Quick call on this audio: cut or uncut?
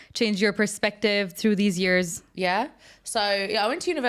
uncut